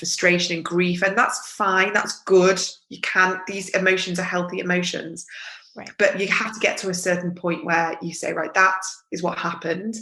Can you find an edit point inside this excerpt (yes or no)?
no